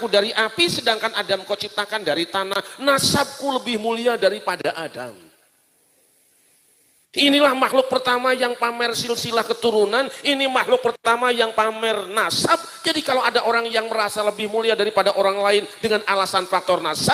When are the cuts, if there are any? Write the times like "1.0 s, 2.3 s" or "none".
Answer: none